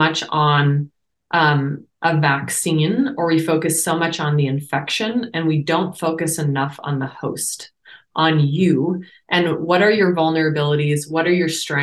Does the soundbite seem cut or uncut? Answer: uncut